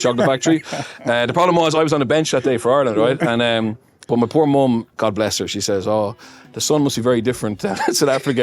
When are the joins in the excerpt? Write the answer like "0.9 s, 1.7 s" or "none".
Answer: 4.0 s, 4.9 s

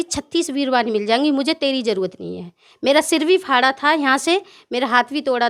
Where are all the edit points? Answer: none

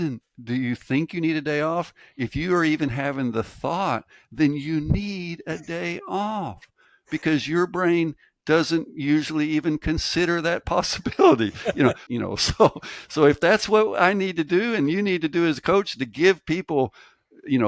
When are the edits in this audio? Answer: none

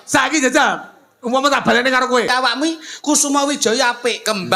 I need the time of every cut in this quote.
2.3 s

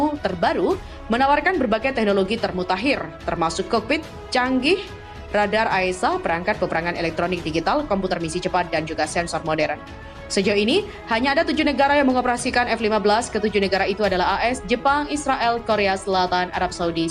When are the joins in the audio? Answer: none

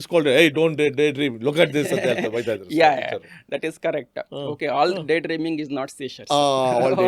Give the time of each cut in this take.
none

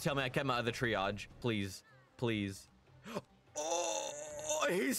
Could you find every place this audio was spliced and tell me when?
1.3 s

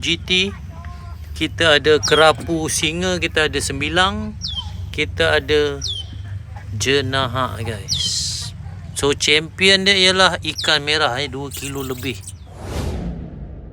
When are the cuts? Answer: 12.7 s

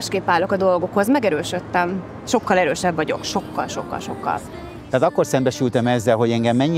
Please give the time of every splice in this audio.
4.5 s

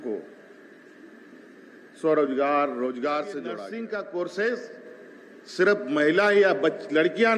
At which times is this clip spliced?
3.6 s

